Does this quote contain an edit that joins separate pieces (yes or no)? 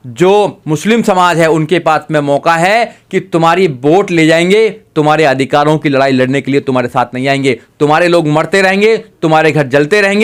no